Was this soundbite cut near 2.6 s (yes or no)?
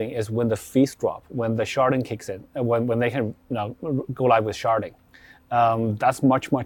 no